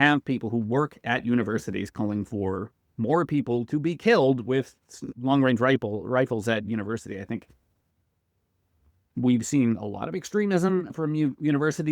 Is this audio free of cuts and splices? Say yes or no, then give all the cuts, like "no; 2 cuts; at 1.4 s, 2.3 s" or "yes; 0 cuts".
no; 2 cuts; at 5.0 s, 10.9 s